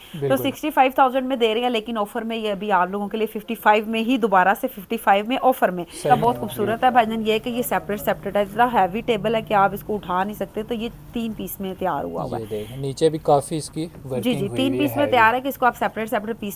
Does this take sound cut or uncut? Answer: cut